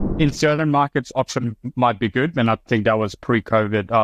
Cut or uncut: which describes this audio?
uncut